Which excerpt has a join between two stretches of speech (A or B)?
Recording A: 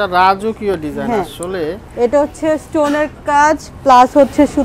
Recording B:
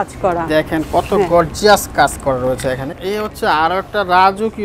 B